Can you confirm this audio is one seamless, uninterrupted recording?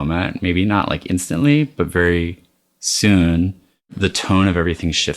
no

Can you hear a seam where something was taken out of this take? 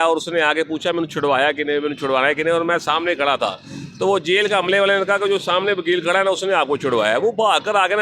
no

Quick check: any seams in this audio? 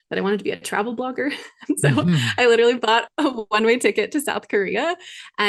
no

